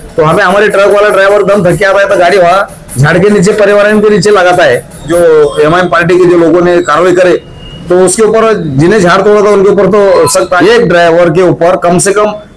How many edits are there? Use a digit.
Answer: 2